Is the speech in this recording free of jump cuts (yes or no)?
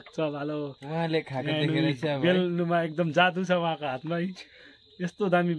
yes